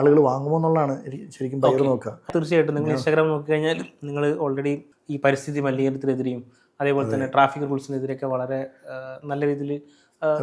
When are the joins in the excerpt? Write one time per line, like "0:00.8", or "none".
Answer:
0:02.3
0:04.9